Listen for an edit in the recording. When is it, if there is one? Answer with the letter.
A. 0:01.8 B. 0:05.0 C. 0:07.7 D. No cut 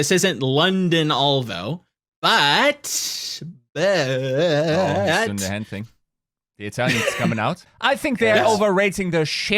C